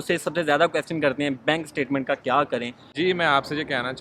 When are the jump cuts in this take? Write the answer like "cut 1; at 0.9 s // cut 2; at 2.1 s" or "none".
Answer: cut 1; at 2.8 s